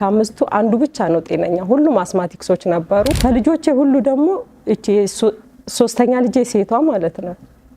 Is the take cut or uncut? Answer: cut